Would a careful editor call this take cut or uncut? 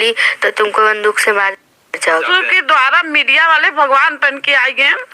cut